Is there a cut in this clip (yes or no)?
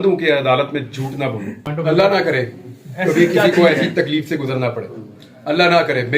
yes